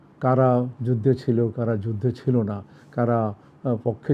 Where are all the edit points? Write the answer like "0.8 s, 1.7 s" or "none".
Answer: none

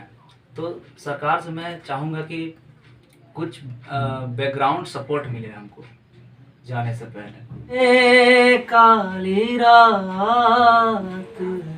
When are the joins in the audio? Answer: 7.7 s

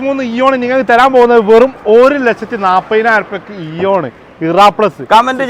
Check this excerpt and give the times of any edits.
none

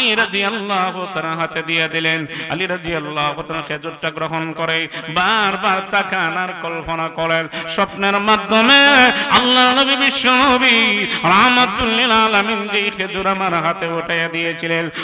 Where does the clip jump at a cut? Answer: none

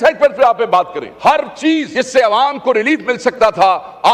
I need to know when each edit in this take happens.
1.0 s, 1.9 s

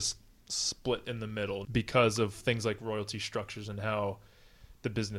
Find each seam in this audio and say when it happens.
1.6 s

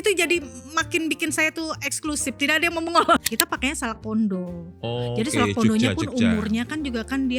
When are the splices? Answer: 3.2 s

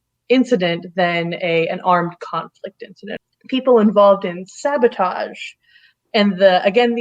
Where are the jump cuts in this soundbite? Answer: 3.1 s

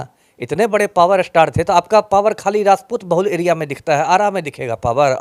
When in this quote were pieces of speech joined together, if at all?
none

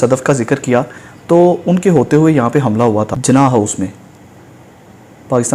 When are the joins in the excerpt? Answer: 3.2 s

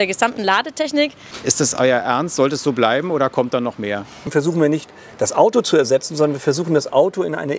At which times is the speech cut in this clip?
1.3 s, 4.3 s

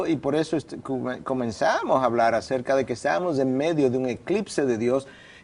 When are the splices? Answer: 3.3 s

